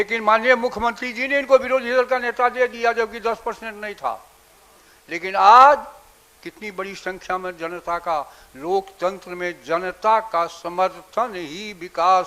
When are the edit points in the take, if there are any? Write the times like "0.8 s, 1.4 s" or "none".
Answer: none